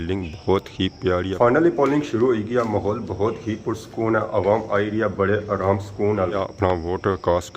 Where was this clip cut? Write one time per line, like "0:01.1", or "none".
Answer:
0:01.3
0:06.4